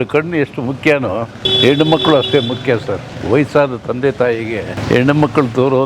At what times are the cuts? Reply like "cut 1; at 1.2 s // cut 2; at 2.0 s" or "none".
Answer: cut 1; at 1.5 s // cut 2; at 4.8 s